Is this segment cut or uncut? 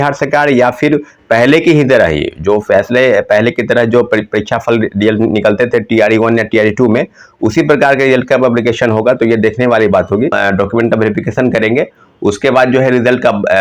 cut